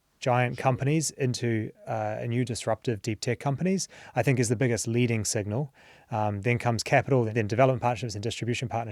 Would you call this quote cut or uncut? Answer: cut